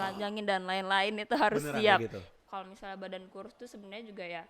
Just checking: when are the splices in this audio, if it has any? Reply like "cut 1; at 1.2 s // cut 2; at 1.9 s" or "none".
cut 1; at 2.5 s